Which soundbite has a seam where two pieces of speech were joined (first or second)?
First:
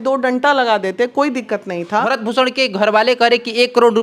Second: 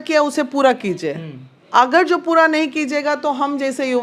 first